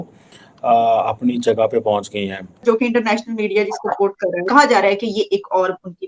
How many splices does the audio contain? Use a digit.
2